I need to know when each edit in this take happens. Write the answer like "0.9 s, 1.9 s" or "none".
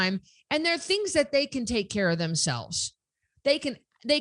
none